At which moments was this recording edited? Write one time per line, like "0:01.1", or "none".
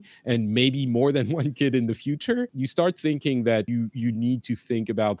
0:02.6
0:03.7